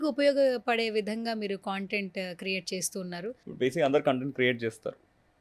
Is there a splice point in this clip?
yes; 1 cut; at 3.4 s

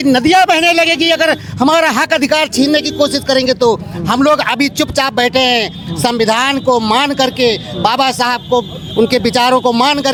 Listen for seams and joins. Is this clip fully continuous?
yes; 0 cuts

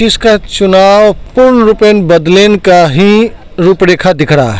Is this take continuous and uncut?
no; 2 cuts; at 1.2 s, 3.4 s

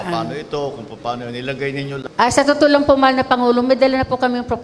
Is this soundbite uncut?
no; 1 cut; at 2.0 s

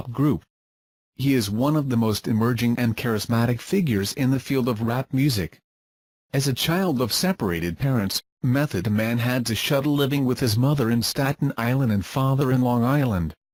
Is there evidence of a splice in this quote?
no; 0 cuts

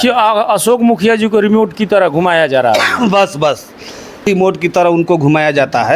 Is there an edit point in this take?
no; 0 cuts

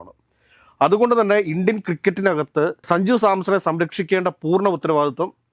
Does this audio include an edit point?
no; 0 cuts

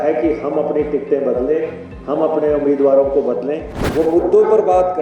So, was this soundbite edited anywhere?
yes; 1 cut; at 3.7 s

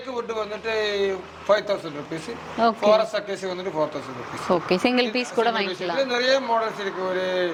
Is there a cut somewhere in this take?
no; 0 cuts

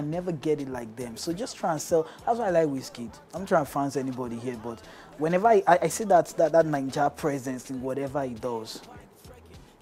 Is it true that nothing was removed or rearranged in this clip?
yes; 0 cuts

